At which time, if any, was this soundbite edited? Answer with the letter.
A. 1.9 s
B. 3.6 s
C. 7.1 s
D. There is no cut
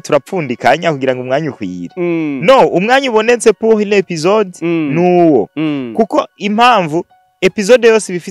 D